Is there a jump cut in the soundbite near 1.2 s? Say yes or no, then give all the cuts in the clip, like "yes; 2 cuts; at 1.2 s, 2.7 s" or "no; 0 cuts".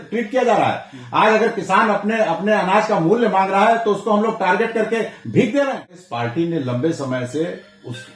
no; 1 cut; at 6.1 s